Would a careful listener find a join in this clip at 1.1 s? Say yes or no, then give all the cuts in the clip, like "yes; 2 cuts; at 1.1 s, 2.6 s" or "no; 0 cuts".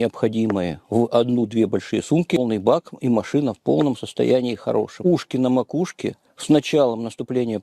no; 2 cuts; at 2.4 s, 4.9 s